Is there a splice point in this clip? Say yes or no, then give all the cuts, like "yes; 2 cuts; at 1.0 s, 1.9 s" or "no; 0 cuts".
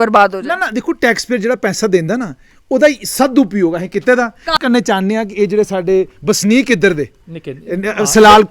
yes; 1 cut; at 4.5 s